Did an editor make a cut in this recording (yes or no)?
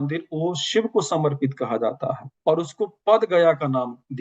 no